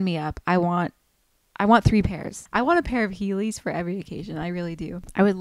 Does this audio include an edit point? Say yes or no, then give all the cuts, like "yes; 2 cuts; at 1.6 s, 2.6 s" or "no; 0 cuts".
yes; 1 cut; at 2.4 s